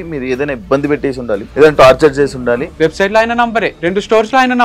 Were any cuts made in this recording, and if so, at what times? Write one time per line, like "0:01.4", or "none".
0:01.5
0:02.7
0:03.7